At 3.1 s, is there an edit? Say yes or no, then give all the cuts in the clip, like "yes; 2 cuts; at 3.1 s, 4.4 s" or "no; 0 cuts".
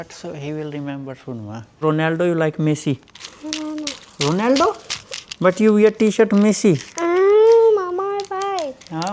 no; 1 cut; at 1.8 s